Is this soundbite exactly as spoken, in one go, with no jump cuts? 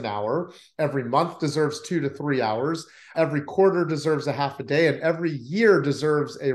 no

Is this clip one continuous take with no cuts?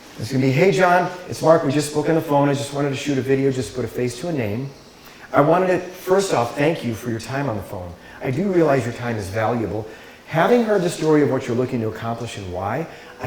yes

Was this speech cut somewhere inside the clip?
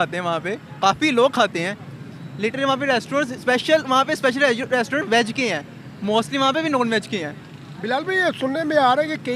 no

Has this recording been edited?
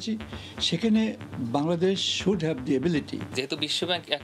yes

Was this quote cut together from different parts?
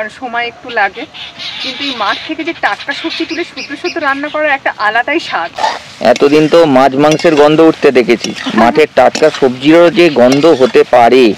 yes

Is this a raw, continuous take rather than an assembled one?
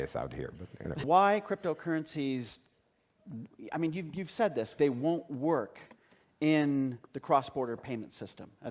no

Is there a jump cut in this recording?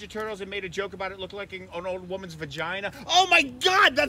yes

